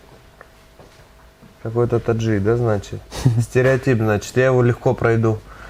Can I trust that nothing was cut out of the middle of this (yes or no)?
yes